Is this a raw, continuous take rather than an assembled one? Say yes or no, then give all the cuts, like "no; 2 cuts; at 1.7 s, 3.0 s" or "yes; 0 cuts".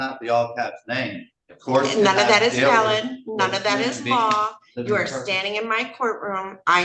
yes; 0 cuts